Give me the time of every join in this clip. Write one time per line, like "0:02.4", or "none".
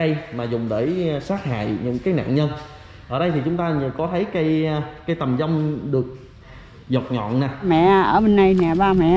0:07.6